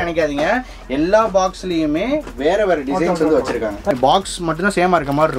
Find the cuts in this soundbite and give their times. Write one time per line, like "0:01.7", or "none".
0:03.9